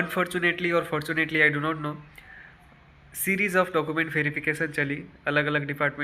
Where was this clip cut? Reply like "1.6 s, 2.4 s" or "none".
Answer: none

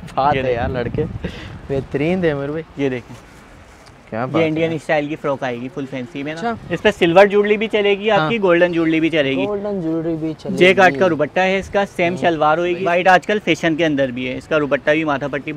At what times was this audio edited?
2.6 s, 6.7 s, 12.8 s

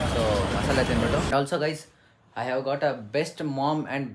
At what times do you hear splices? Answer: 1.3 s

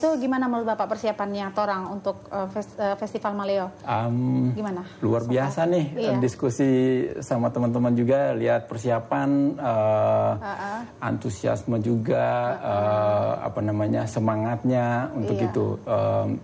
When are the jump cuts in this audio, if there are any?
none

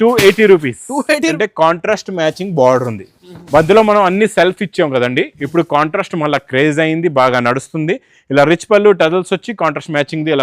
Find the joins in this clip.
1.4 s

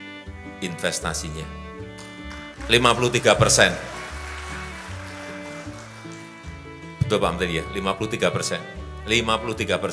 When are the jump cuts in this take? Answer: none

